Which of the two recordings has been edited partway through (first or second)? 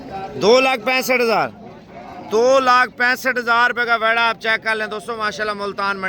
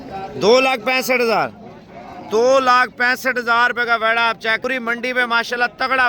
second